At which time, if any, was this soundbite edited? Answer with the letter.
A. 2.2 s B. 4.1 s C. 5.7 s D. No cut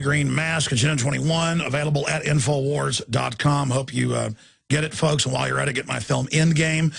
B